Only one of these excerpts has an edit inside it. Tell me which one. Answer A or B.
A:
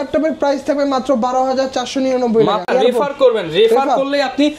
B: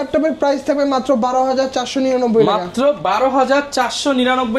A